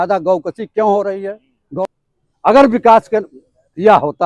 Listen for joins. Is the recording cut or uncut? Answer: cut